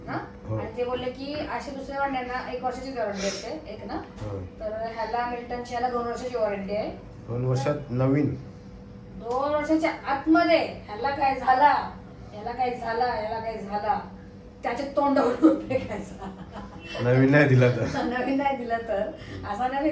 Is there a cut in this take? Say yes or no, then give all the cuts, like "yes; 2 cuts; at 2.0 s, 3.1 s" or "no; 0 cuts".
no; 0 cuts